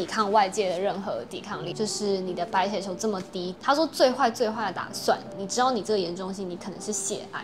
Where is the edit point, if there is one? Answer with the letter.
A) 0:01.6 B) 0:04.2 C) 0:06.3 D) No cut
A